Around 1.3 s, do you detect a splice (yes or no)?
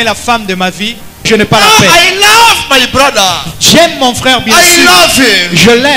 yes